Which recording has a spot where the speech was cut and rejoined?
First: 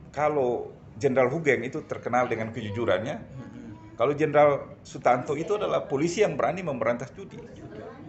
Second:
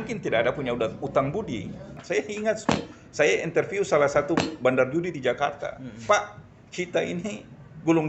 second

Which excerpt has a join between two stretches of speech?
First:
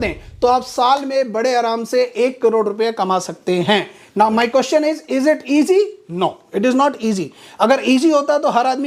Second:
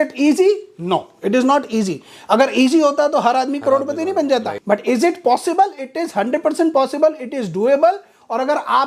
second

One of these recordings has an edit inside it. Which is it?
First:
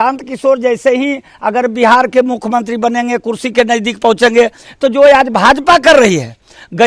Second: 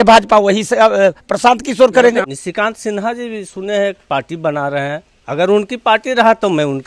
second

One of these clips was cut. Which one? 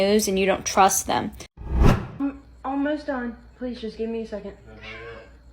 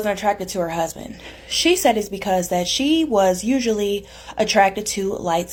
first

